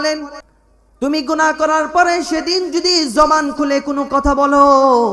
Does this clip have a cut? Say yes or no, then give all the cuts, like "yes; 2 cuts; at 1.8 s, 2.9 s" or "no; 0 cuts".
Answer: yes; 1 cut; at 1.0 s